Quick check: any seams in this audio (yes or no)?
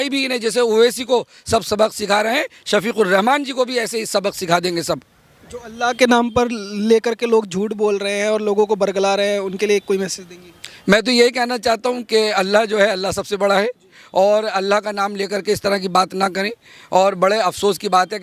no